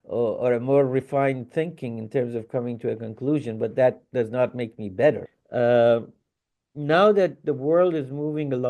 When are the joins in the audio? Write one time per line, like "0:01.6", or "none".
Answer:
0:05.4

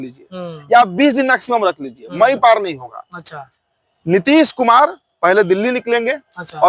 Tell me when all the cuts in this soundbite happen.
none

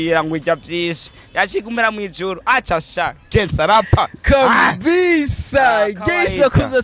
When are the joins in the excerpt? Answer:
none

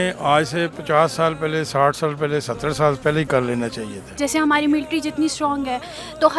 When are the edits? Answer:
0:04.1

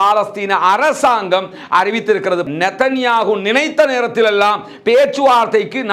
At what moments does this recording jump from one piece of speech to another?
0:02.4

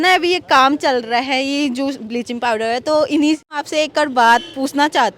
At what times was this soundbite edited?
0:03.5

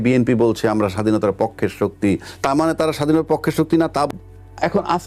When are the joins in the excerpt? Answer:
0:04.1

